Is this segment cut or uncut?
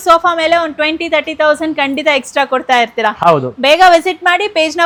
uncut